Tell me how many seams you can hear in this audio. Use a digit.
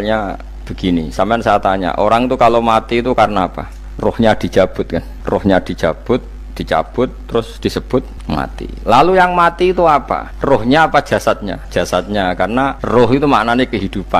3